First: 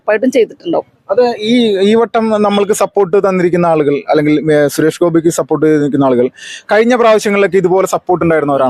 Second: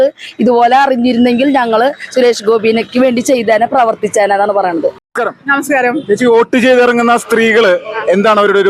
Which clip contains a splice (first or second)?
second